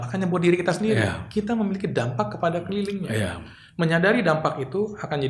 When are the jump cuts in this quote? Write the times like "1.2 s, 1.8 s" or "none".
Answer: none